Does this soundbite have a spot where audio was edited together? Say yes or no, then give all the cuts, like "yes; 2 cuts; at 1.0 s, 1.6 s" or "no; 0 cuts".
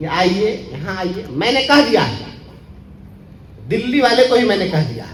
no; 0 cuts